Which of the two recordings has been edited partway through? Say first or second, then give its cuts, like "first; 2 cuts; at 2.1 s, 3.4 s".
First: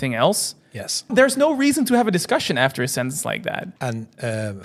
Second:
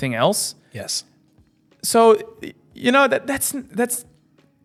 first; 2 cuts; at 1.1 s, 3.7 s